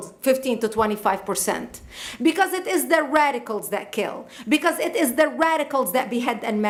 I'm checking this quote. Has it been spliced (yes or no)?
no